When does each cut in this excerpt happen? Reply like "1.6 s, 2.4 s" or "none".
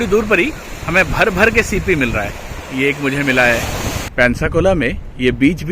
4.0 s